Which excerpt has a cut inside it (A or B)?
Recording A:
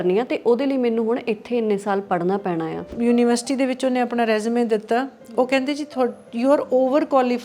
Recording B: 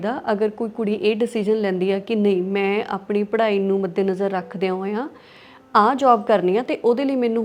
A